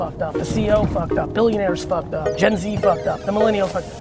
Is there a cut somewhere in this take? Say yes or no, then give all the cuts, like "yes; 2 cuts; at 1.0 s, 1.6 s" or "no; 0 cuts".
yes; 1 cut; at 2.3 s